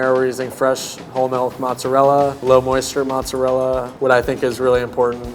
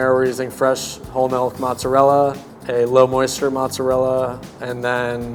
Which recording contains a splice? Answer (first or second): first